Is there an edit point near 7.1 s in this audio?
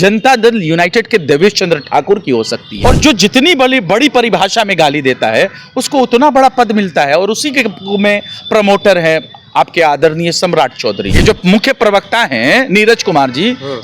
no; 2 cuts; at 2.6 s, 11.1 s

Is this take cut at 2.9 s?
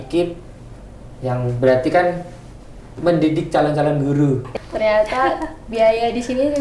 no; 1 cut; at 4.5 s

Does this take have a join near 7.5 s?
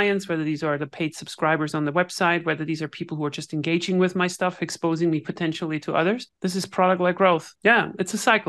yes; 2 cuts; at 6.3 s, 7.5 s

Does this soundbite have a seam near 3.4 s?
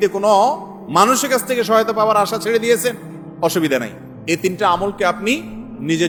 no; 0 cuts

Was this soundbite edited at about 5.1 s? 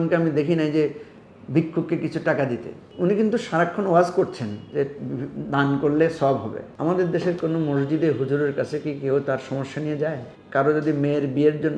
no; 3 cuts; at 2.8 s, 6.6 s, 10.3 s

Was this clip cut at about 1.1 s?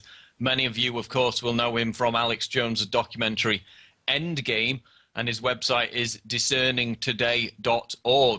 no; 1 cut; at 3.2 s

